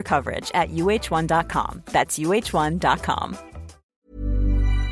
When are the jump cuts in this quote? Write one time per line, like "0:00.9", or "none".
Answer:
0:03.9